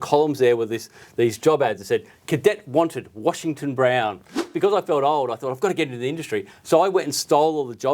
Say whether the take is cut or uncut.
cut